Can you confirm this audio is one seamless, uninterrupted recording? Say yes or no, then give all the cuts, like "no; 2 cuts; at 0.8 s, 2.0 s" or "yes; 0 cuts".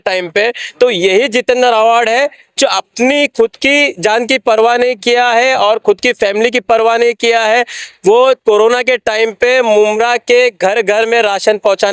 yes; 0 cuts